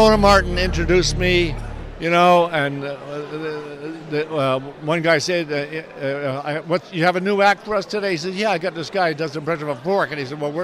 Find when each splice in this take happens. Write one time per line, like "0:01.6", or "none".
none